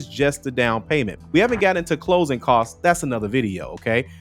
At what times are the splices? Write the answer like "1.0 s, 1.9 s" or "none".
none